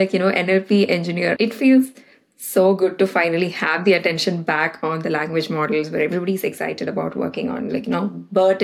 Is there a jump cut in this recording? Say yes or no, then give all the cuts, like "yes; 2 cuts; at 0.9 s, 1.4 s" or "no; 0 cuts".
yes; 1 cut; at 1.3 s